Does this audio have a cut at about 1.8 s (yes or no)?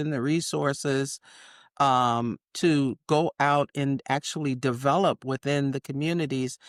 no